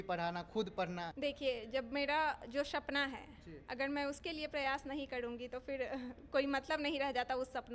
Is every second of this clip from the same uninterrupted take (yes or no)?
no